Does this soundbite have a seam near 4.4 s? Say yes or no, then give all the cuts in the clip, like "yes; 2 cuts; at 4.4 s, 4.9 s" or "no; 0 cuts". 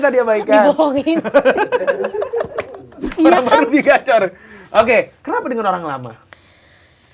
no; 1 cut; at 3.0 s